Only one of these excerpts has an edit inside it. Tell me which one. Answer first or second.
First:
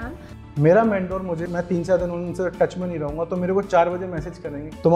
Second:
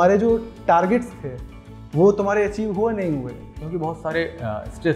first